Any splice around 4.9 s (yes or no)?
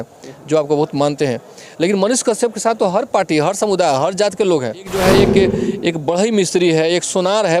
yes